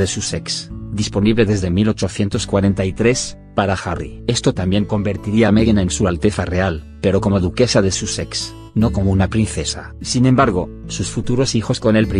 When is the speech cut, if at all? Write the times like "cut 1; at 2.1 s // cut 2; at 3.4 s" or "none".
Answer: cut 1; at 1.0 s